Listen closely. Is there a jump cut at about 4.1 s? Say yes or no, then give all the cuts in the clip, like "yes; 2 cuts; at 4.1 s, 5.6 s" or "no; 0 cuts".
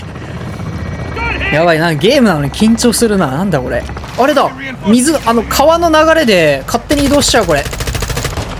yes; 2 cuts; at 1.1 s, 4.1 s